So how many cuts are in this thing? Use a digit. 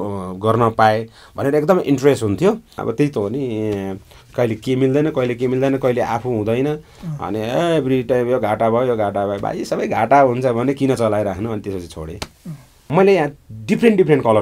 2